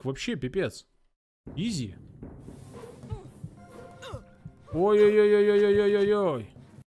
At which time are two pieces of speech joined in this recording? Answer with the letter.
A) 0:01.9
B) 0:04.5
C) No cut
C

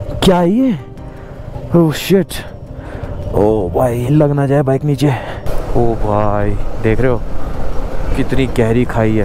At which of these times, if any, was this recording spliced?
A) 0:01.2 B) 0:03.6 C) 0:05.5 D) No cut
C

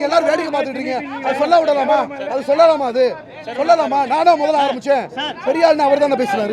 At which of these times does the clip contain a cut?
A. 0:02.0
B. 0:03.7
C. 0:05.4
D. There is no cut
D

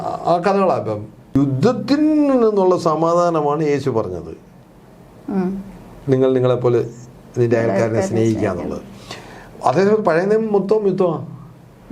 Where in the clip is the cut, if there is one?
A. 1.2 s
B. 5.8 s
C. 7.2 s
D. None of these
A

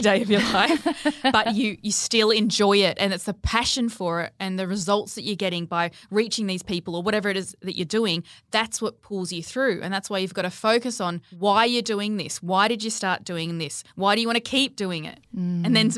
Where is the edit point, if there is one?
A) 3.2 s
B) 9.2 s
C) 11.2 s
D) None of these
C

